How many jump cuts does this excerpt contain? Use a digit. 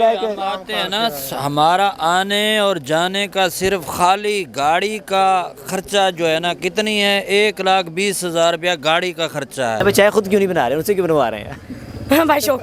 1